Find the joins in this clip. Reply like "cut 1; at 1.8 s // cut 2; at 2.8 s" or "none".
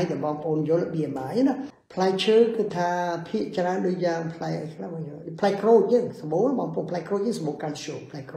cut 1; at 1.8 s